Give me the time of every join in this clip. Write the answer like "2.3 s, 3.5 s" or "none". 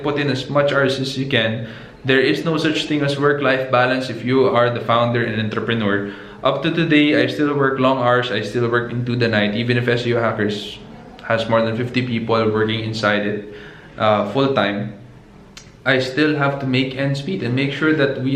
none